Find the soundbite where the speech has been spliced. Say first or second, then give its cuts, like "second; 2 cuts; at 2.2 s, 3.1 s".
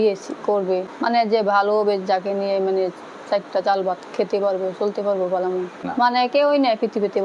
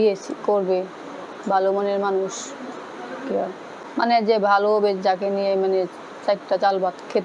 first; 2 cuts; at 0.9 s, 5.8 s